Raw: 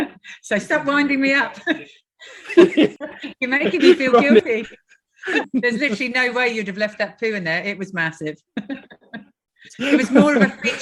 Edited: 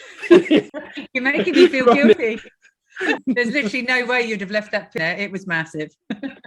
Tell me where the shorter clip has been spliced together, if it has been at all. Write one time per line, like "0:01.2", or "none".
0:05.0